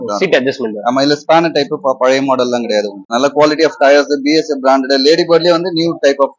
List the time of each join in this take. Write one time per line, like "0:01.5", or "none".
0:03.0